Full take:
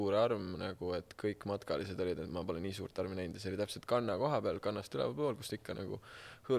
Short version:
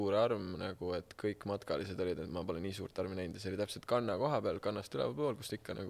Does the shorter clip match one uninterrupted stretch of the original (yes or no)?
yes